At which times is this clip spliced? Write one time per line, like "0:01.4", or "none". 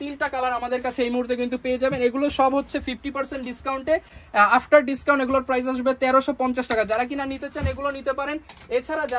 none

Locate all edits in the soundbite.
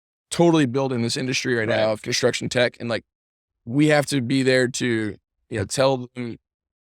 0:03.6

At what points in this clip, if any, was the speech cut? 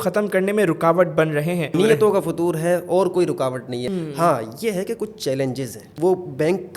0:01.7
0:03.9
0:05.9

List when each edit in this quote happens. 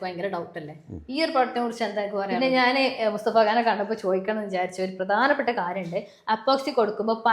0:02.3

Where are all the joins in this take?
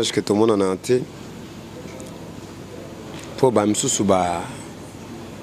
none

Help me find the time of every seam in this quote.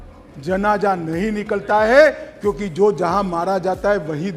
none

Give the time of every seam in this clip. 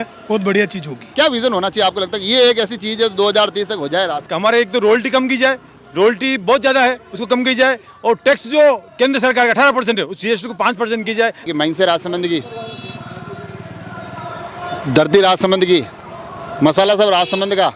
0:01.0
0:04.2
0:11.4

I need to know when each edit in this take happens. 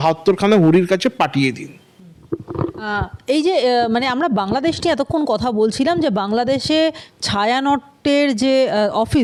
none

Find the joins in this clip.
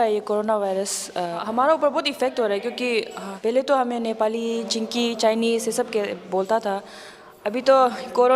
0:01.4
0:03.2

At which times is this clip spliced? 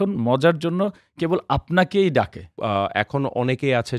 0:02.6

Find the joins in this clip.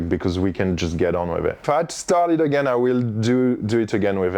0:01.6

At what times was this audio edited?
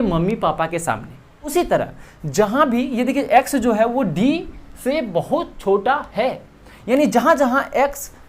0:01.5

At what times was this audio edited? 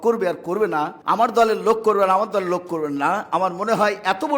0:00.9

